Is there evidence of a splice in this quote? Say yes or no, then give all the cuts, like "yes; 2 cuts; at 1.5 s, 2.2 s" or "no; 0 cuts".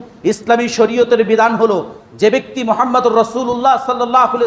no; 0 cuts